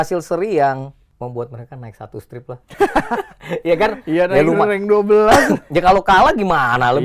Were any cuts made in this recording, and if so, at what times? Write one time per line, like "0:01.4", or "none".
0:01.0